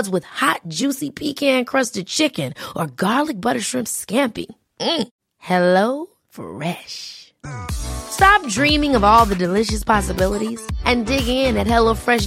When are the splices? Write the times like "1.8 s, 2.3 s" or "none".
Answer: none